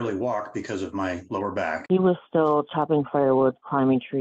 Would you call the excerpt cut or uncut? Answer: cut